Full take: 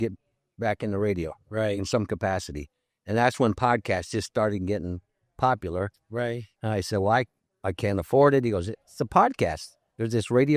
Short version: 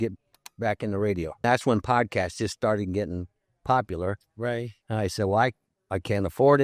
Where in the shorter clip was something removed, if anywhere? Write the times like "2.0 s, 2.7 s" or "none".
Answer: 1.4 s

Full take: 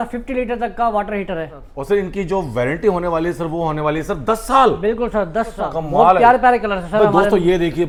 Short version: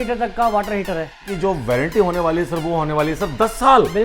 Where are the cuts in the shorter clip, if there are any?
1.3 s

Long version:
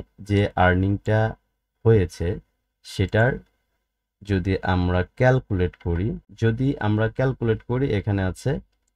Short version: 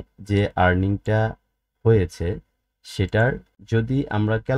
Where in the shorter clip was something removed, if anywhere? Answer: 3.6 s

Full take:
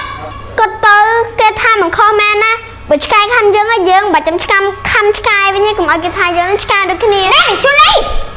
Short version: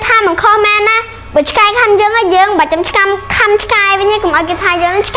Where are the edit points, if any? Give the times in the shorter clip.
none

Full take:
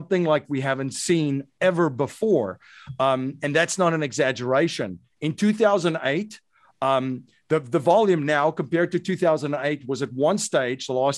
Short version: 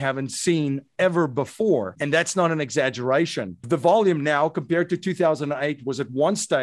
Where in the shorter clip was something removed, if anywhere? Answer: 2.0 s, 3.6 s

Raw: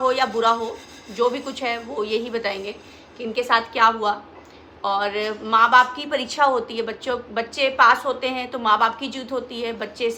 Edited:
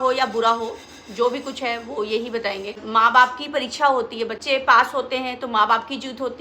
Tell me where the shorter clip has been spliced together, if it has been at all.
2.8 s, 4.4 s

